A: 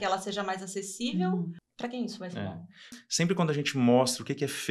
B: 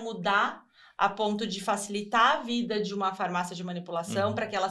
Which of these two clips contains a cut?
A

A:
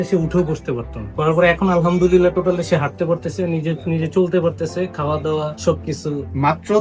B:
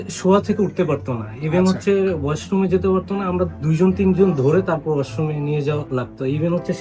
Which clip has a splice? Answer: A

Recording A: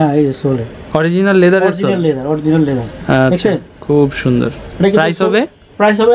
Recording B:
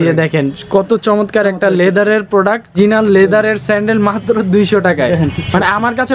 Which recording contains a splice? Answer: B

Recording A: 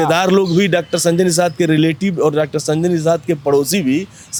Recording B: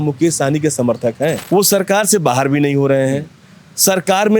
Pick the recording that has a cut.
B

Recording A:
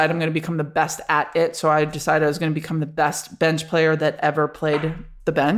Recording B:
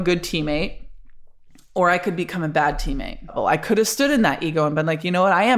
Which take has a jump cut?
B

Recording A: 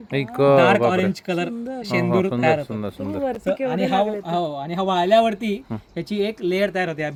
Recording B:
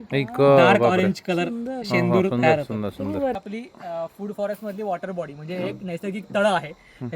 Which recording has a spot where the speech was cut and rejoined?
B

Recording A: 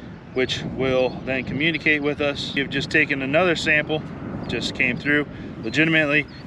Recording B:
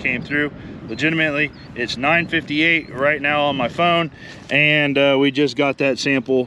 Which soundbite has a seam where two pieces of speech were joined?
A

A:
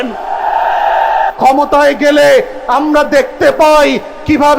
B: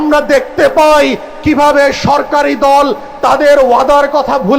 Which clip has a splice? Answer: A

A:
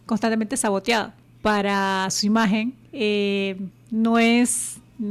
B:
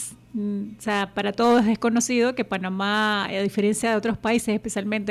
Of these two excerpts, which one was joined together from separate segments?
A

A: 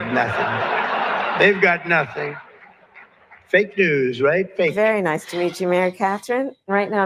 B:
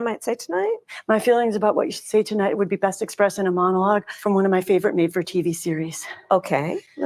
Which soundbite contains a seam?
A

